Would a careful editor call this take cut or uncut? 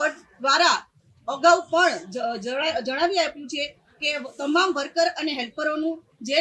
uncut